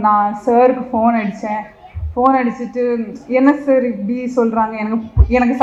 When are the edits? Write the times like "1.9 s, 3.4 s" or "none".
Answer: none